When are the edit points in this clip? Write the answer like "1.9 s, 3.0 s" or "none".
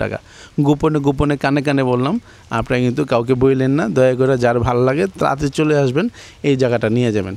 none

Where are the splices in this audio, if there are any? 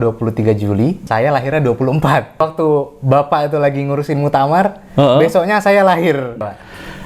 1.0 s, 2.4 s

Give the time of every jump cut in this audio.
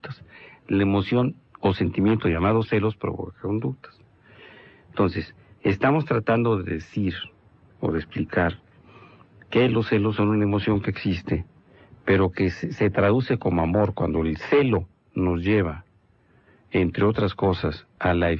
none

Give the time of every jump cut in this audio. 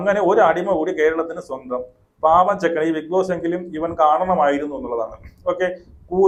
none

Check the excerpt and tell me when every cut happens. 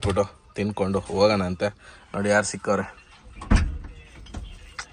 none

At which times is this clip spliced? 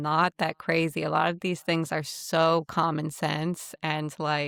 none

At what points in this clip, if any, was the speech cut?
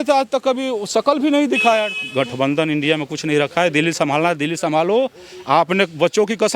2.0 s

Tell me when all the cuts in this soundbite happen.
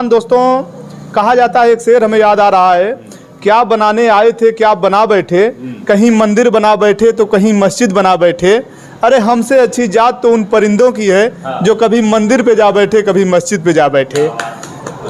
none

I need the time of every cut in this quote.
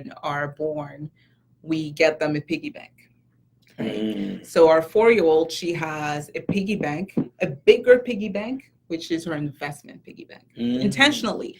none

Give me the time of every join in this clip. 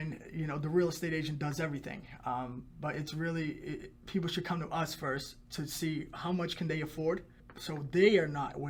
none

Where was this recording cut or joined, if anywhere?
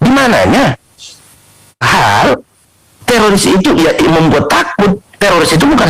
1.8 s

